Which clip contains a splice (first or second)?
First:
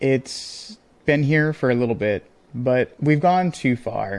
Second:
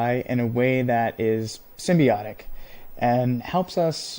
first